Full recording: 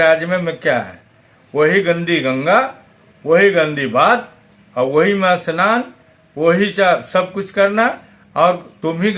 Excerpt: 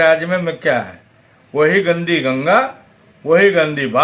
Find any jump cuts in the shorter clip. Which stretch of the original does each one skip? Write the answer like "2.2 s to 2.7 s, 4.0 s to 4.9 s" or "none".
none